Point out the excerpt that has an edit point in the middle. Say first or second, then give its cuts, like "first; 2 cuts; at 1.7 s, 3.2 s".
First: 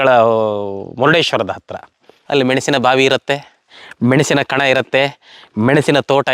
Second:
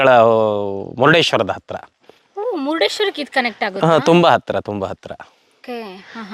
first; 1 cut; at 2.1 s